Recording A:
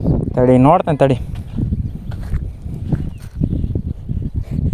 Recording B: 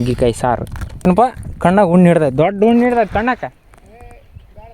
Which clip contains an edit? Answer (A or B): B